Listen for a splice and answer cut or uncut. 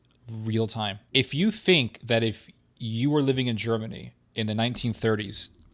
cut